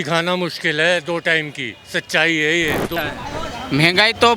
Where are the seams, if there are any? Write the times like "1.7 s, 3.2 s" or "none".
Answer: 3.0 s